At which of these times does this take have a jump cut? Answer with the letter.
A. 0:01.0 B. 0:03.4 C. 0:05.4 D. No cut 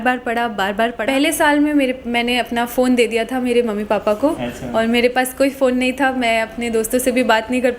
A